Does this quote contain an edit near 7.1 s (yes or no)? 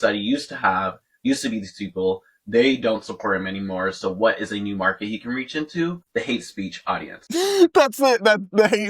yes